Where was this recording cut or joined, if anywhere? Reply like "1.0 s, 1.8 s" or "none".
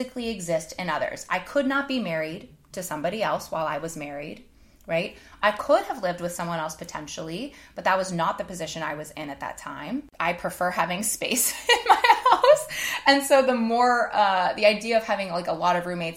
10.1 s